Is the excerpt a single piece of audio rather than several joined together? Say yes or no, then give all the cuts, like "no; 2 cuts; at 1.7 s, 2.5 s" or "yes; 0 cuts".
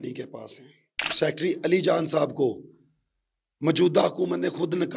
no; 1 cut; at 1.1 s